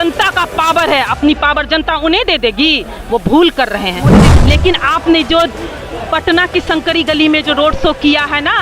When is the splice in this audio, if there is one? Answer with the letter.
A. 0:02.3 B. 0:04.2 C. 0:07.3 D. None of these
B